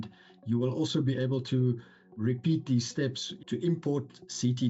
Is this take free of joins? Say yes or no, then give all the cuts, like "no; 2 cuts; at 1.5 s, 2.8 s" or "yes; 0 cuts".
no; 2 cuts; at 2.2 s, 3.3 s